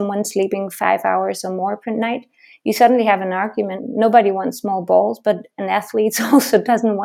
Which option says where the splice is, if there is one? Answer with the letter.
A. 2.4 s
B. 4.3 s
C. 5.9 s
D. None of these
D